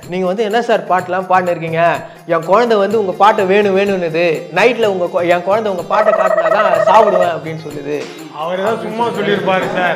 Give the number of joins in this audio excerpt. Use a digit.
0